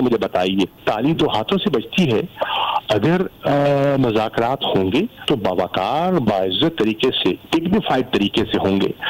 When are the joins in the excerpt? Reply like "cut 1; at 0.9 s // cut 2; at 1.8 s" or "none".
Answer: cut 1; at 5.2 s // cut 2; at 7.4 s

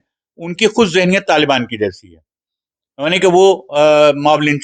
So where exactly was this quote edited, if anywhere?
none

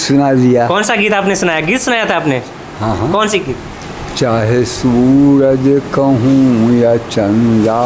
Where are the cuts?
none

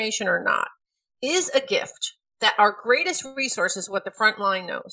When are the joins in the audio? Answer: cut 1; at 2.2 s

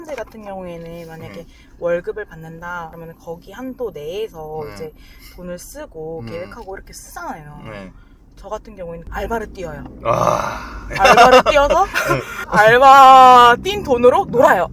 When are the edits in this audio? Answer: cut 1; at 3.0 s // cut 2; at 9.1 s // cut 3; at 12.5 s

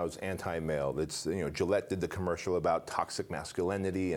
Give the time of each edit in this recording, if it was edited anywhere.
none

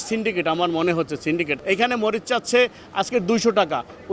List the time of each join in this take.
cut 1; at 1.5 s

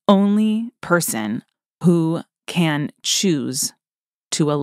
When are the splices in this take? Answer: cut 1; at 1.5 s

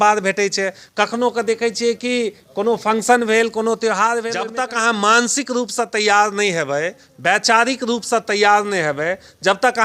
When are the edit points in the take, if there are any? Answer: cut 1; at 4.4 s

